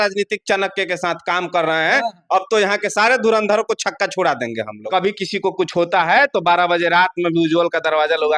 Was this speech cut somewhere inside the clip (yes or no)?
yes